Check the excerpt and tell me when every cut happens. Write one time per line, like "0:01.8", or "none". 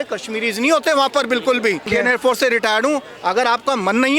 0:01.9